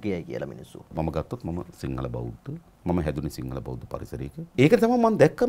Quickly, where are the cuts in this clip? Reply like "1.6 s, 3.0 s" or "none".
0.9 s, 2.7 s, 4.5 s